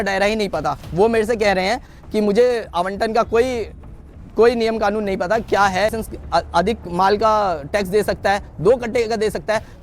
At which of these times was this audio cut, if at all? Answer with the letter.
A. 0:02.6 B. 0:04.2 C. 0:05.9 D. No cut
C